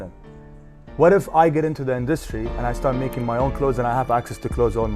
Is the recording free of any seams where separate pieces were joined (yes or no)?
yes